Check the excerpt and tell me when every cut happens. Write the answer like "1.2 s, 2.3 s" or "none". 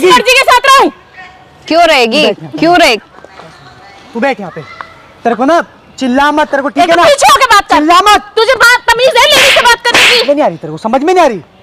none